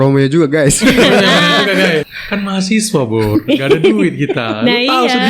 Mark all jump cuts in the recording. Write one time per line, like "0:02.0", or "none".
0:02.0